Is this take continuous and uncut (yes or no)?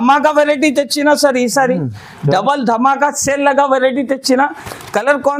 yes